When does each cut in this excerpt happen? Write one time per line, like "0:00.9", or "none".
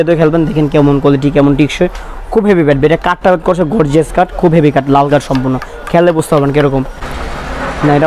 0:07.0